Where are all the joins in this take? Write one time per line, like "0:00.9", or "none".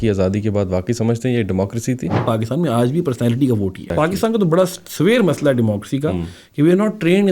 0:02.2
0:03.9

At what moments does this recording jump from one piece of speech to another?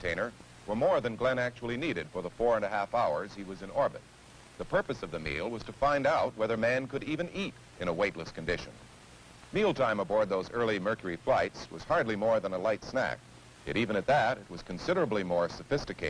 none

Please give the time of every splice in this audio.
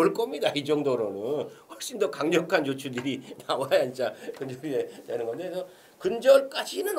none

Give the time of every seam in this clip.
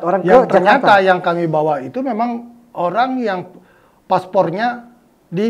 none

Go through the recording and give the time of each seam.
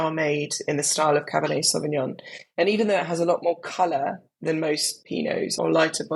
0:04.9

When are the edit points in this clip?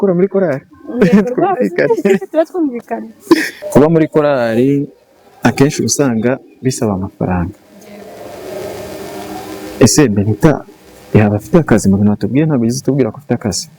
0:03.6

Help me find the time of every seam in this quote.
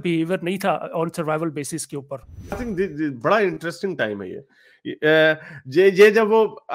0:02.6

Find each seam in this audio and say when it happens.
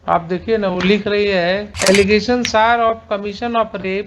0:01.7

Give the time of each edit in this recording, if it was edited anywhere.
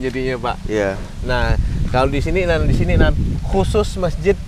none

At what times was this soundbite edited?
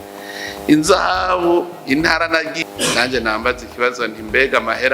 0:02.5

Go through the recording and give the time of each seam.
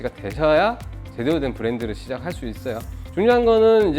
0:02.9

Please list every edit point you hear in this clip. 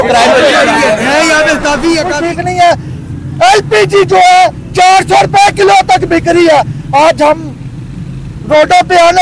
0:02.1

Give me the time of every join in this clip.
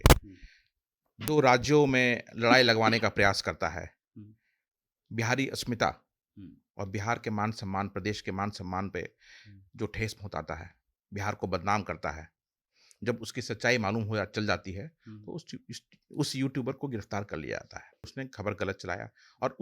0:18.1

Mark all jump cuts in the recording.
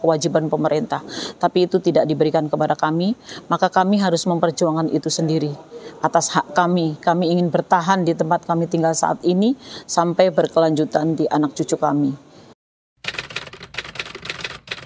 0:12.6

